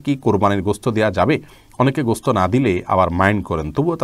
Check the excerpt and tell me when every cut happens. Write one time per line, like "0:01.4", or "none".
none